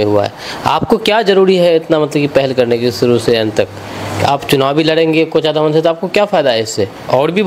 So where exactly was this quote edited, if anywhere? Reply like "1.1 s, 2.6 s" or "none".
none